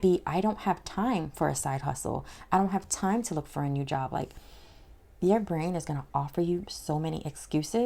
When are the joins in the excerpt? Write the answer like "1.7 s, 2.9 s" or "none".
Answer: none